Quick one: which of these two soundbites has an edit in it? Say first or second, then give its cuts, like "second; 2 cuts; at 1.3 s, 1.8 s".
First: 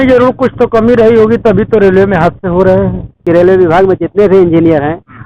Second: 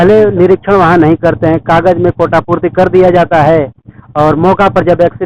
first; 1 cut; at 3.2 s